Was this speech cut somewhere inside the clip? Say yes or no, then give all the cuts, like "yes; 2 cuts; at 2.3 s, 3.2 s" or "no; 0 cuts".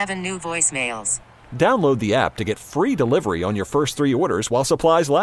no; 0 cuts